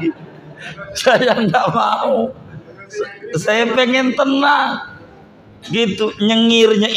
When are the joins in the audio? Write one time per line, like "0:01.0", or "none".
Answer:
none